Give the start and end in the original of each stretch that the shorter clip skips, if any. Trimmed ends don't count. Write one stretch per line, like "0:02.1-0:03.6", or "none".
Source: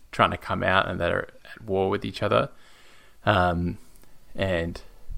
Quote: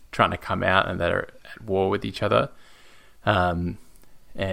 none